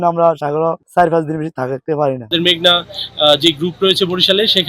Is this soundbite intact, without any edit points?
no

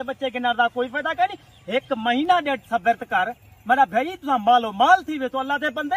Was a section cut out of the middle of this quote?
no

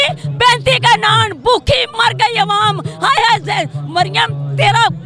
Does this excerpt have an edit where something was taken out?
no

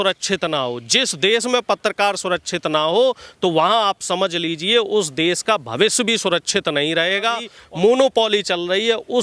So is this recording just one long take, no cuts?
no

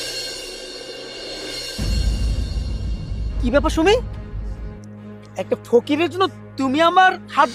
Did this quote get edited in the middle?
no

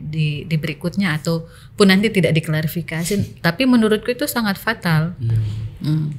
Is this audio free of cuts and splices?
yes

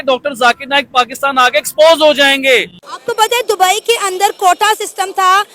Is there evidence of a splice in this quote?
no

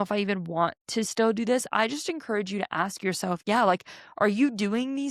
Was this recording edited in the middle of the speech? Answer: no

